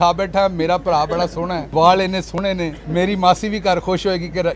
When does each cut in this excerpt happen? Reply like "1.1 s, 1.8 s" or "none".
1.6 s, 2.8 s